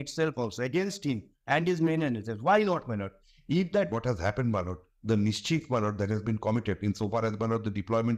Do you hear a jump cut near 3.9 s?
yes; 1 cut; at 3.9 s

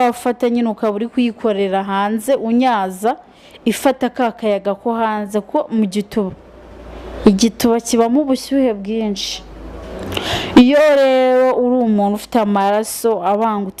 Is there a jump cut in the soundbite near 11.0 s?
no; 0 cuts

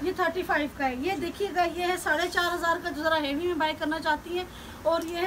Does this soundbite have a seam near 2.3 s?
no; 0 cuts

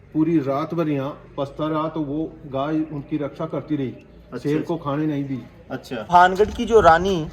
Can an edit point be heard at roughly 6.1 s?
yes; 1 cut; at 6.1 s

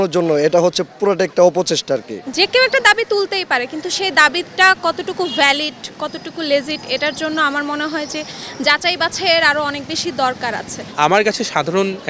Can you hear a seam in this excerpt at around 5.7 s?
no; 2 cuts; at 2.2 s, 10.8 s

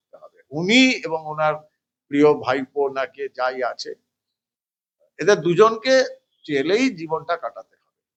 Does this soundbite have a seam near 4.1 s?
no; 0 cuts

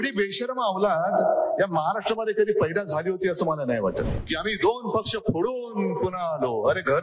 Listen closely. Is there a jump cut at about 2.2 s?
no; 1 cut; at 4.2 s

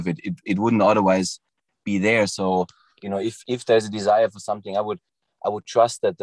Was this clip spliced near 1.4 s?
no; 0 cuts

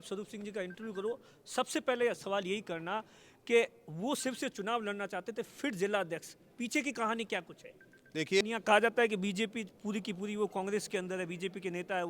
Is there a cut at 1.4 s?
no; 1 cut; at 8.4 s

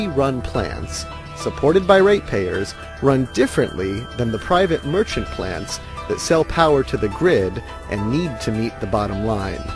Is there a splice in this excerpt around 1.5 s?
no; 1 cut; at 6.8 s

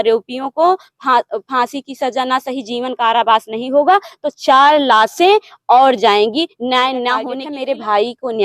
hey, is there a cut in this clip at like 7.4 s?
yes; 1 cut; at 7.4 s

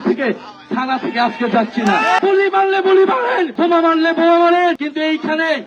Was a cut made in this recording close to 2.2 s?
yes; 3 cuts; at 2.2 s, 3.5 s, 4.8 s

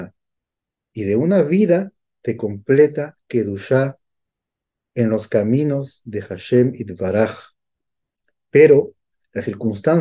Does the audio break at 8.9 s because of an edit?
no; 0 cuts

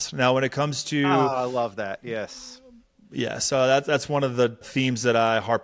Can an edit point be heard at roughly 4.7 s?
yes; 1 cut; at 4.7 s

